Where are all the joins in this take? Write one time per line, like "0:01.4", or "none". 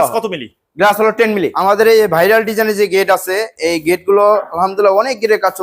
0:01.5